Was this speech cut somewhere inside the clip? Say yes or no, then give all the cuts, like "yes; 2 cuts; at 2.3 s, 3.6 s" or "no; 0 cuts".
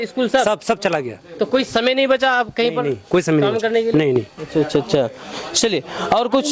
no; 0 cuts